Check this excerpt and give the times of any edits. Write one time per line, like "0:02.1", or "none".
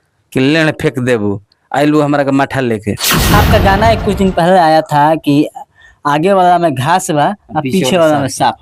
0:03.3